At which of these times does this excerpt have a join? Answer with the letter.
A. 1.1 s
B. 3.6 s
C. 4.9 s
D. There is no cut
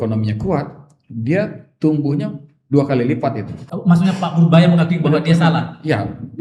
B